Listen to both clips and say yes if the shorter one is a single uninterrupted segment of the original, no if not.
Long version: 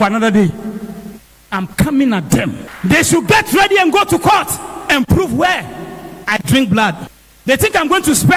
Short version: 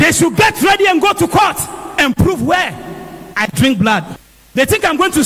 yes